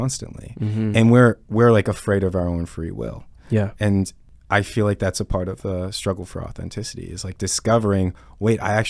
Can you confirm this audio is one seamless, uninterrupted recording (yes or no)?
no